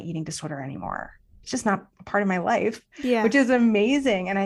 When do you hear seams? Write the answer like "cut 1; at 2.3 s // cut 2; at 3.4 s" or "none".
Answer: none

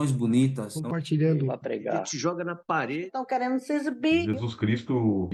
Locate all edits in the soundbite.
none

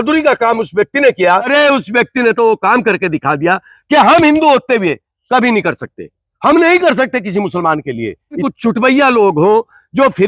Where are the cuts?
cut 1; at 1.5 s // cut 2; at 8.4 s

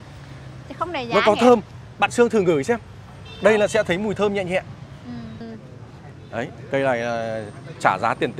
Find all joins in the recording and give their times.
cut 1; at 5.4 s

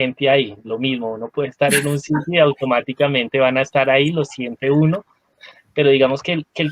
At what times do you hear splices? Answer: none

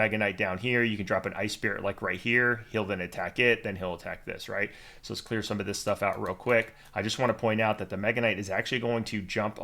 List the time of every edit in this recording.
none

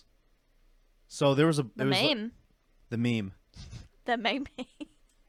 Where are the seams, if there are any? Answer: none

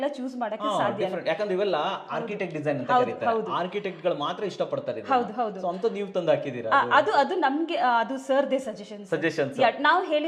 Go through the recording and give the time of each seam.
none

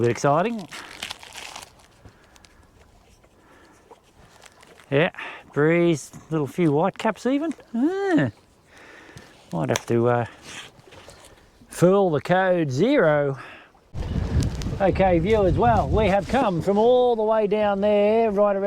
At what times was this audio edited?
cut 1; at 14.0 s

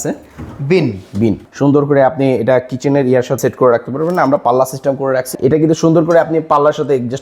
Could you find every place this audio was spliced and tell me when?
cut 1; at 1.5 s // cut 2; at 3.4 s // cut 3; at 5.3 s

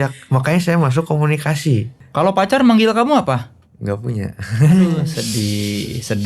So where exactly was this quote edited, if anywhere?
cut 1; at 2.0 s

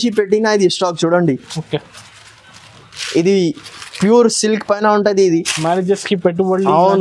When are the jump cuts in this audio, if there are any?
none

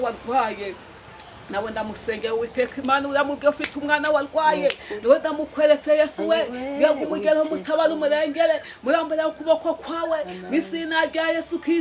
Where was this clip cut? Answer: none

